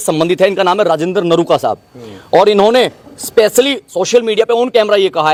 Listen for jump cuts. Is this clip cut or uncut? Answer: uncut